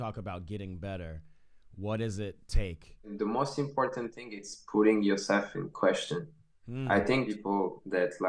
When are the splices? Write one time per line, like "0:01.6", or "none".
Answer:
0:03.1
0:07.3